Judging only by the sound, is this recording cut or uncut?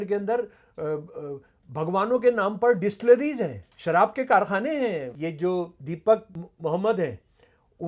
cut